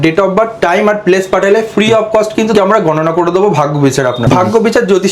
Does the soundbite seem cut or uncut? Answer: cut